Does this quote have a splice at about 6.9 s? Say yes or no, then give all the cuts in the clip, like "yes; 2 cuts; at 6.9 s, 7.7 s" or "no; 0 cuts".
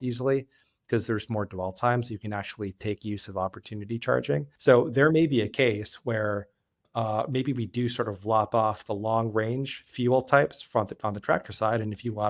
yes; 2 cuts; at 4.5 s, 6.9 s